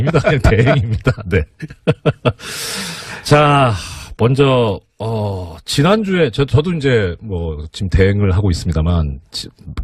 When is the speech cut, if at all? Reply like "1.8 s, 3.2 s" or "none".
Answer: 8.4 s